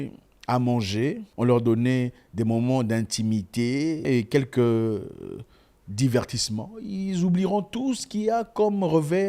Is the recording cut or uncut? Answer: cut